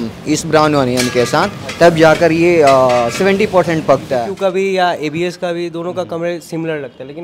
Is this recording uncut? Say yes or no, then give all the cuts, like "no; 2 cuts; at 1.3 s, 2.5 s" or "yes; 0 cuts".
no; 1 cut; at 4.3 s